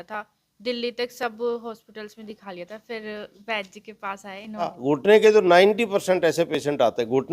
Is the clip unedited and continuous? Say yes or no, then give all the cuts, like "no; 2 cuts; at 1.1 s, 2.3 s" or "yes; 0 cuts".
no; 1 cut; at 4.8 s